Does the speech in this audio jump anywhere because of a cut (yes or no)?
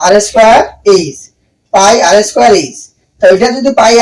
no